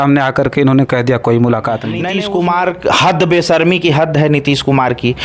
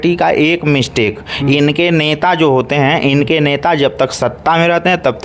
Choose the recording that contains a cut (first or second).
first